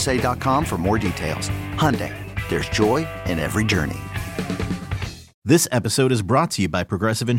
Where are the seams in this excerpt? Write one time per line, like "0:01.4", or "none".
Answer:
0:05.3